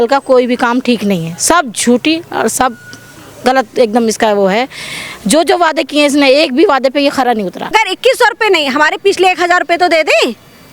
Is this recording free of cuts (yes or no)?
no